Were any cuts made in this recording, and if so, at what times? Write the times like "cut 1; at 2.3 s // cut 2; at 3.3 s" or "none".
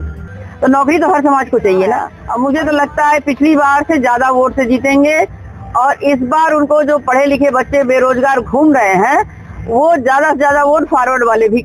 cut 1; at 2.2 s